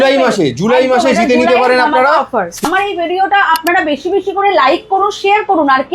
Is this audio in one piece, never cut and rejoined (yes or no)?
no